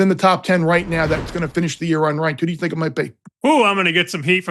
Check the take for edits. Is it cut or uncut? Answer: cut